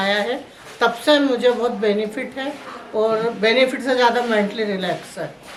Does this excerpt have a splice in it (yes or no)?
no